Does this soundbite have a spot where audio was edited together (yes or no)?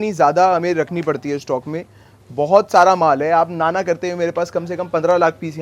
no